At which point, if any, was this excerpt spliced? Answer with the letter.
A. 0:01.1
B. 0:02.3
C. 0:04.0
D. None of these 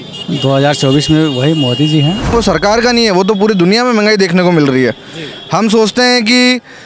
B